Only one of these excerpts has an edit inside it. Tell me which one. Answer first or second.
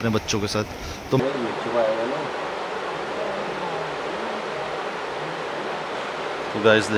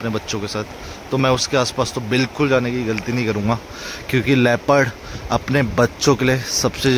first